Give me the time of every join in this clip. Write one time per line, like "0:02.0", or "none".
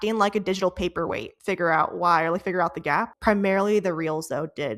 0:01.3
0:03.1